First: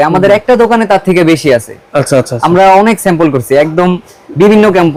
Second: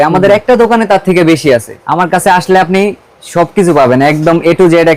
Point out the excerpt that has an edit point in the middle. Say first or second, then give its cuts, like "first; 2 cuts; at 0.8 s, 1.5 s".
second; 1 cut; at 1.8 s